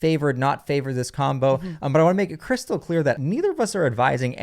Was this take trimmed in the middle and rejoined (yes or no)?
yes